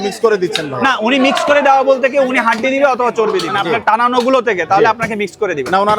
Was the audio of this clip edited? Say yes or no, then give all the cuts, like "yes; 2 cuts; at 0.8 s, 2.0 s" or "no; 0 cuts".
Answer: yes; 1 cut; at 3.5 s